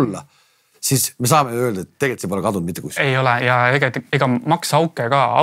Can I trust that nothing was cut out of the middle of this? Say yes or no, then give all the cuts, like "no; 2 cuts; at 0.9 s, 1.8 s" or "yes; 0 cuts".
yes; 0 cuts